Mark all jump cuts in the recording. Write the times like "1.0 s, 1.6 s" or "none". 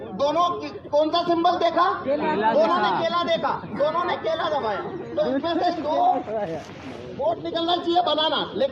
none